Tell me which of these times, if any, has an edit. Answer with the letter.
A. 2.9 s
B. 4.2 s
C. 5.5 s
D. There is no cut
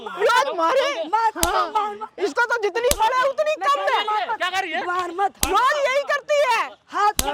D